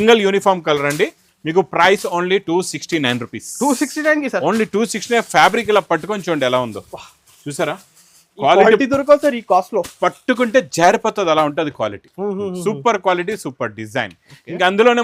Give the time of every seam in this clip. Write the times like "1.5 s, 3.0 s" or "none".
none